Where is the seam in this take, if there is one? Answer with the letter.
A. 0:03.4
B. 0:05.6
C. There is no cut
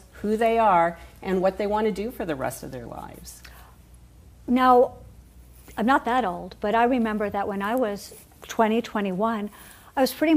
A